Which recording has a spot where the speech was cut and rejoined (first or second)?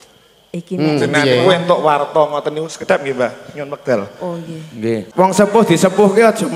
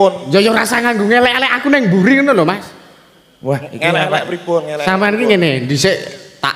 first